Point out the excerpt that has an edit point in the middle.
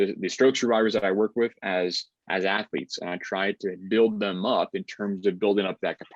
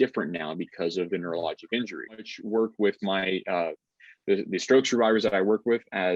second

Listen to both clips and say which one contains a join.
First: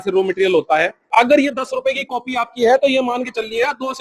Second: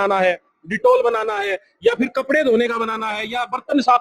first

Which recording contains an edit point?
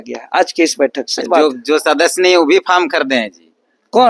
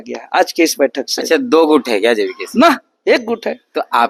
first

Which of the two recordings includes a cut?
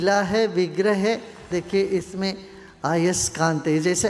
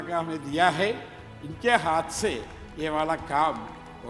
first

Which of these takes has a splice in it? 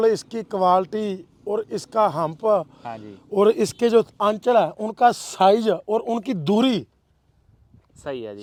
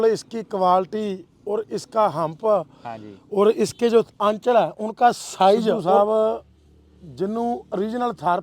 second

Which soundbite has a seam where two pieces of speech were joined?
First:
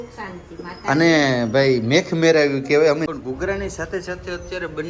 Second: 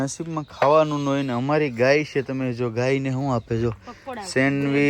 first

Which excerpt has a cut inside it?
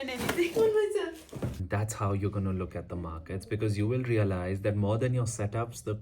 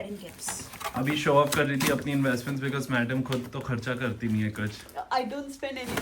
first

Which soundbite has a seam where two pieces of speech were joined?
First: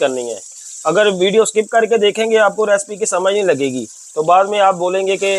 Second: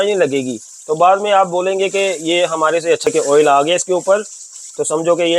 second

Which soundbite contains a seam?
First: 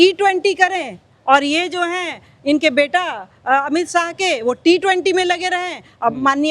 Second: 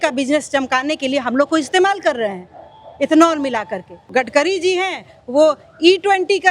second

